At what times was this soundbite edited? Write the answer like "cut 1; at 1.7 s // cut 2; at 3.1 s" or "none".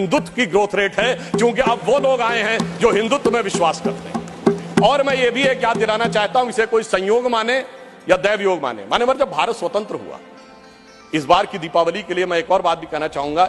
none